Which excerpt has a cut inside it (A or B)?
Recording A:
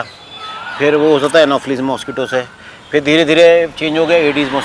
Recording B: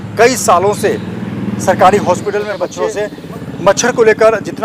B